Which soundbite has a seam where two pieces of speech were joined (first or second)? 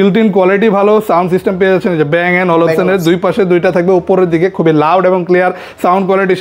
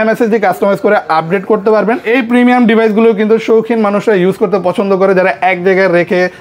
second